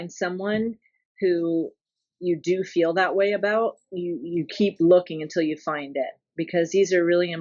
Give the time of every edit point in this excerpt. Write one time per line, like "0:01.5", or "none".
none